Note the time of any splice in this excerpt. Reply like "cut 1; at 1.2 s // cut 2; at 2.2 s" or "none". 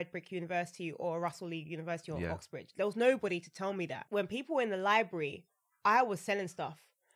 cut 1; at 4.0 s